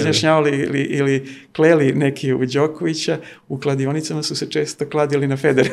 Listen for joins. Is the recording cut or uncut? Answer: uncut